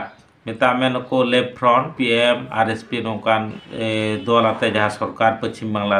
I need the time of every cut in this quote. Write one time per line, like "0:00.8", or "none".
0:01.9